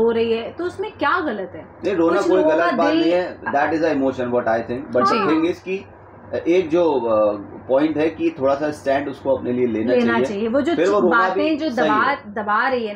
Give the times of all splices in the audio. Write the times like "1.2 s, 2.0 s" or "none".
none